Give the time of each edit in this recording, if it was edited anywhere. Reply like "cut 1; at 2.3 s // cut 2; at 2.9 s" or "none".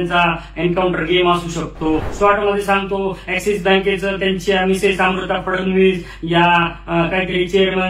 cut 1; at 2.1 s